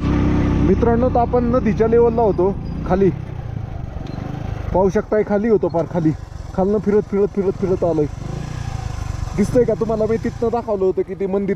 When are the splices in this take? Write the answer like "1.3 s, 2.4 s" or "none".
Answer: none